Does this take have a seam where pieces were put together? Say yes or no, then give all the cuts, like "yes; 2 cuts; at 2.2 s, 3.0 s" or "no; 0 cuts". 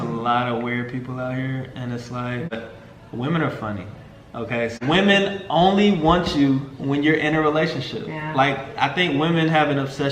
yes; 2 cuts; at 2.5 s, 4.8 s